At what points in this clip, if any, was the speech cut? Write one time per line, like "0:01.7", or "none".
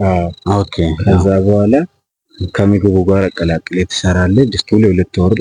none